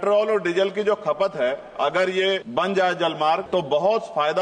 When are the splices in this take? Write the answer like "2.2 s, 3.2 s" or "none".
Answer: 2.4 s, 3.4 s